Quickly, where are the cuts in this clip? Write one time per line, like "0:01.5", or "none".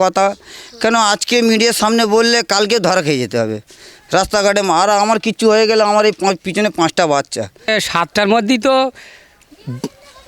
0:07.7